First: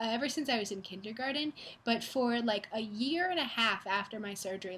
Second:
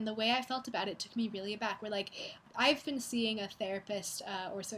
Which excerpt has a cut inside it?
second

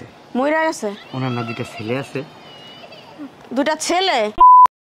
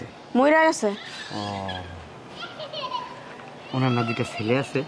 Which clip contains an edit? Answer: first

